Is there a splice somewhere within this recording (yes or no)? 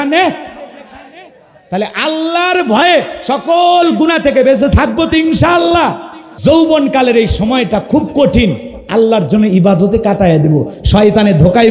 yes